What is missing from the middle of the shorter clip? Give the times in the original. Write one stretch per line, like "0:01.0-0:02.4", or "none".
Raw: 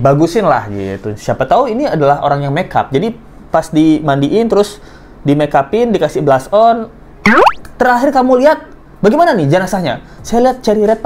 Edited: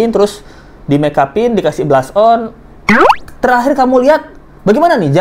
none